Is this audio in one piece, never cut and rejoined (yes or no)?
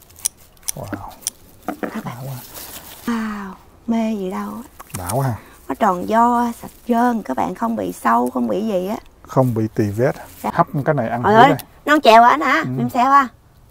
no